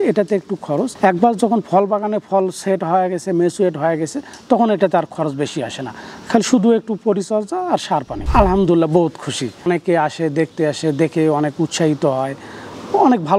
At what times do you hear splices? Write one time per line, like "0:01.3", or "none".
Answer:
0:08.2
0:09.6